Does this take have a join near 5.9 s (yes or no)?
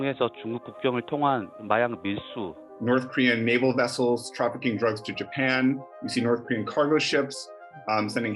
no